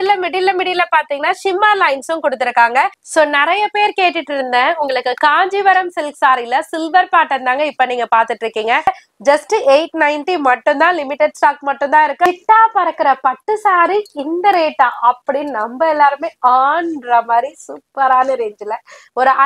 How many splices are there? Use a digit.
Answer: 3